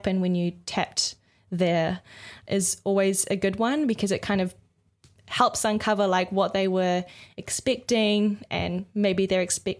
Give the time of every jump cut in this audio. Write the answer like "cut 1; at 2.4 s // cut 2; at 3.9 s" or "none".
none